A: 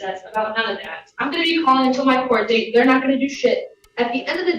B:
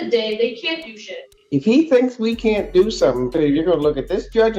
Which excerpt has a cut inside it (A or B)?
B